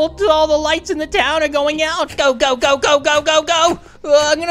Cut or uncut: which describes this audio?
cut